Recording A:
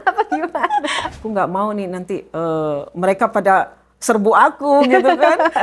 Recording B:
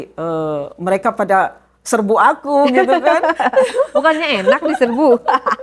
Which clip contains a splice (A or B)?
A